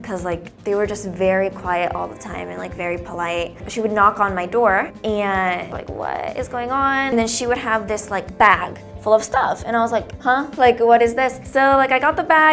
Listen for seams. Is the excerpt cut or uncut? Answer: cut